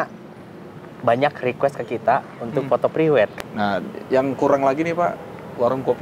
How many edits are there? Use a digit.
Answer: 1